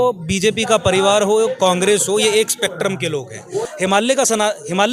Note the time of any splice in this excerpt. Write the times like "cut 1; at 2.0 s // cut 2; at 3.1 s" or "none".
cut 1; at 3.7 s